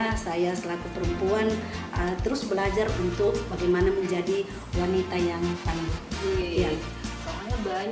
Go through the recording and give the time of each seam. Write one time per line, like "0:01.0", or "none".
none